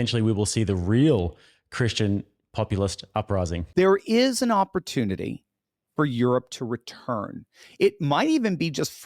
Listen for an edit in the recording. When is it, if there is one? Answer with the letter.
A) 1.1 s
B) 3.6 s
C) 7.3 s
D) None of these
B